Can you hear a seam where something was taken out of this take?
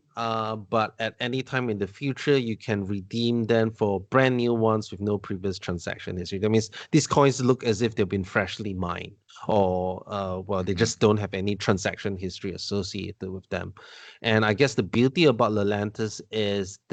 no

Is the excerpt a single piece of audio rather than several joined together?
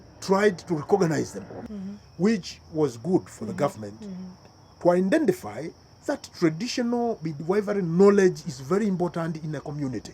no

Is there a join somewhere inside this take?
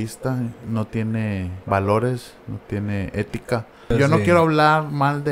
yes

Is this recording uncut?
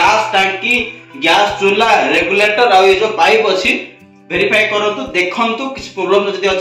yes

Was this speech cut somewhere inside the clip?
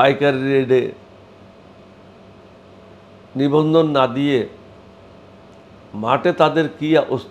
no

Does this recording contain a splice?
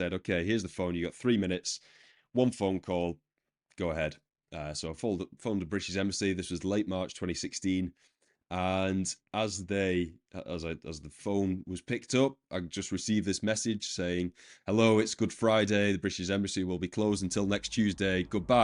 no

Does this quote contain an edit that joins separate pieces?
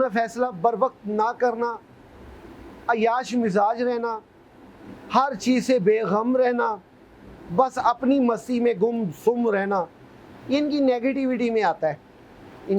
no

